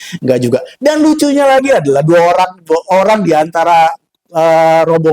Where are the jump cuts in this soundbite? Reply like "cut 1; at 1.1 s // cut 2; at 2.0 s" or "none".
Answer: none